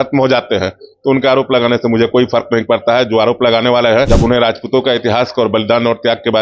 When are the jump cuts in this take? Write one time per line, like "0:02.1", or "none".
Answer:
0:04.1

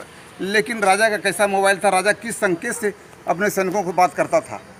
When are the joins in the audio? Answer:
none

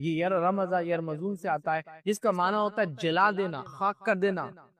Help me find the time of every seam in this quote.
0:03.6

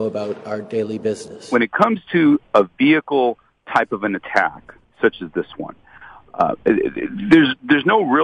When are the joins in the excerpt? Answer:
0:01.5

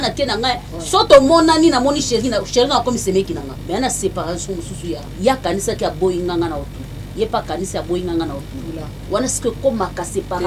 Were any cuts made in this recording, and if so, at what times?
0:03.5
0:05.1

